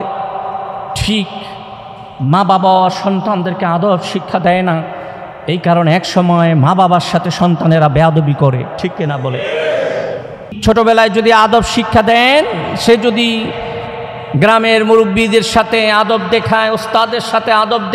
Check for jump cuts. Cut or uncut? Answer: cut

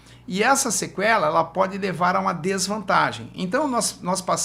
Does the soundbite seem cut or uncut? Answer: uncut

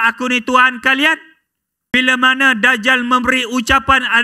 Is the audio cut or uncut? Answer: cut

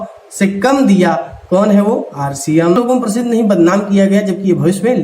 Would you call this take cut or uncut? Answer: cut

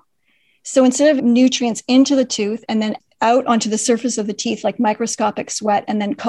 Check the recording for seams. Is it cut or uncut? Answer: cut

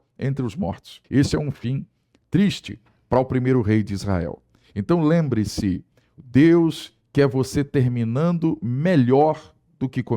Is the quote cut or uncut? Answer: cut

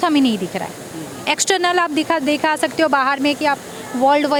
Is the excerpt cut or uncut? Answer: uncut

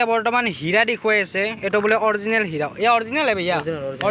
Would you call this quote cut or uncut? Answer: uncut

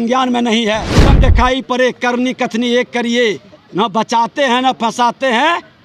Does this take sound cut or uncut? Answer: cut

